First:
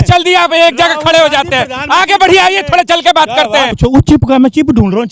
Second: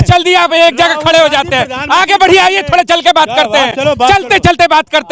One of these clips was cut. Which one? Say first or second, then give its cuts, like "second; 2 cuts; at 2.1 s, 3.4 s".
first; 1 cut; at 3.7 s